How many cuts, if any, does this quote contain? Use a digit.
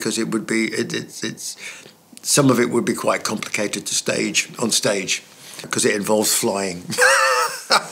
1